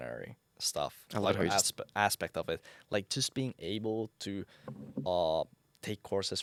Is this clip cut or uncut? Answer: uncut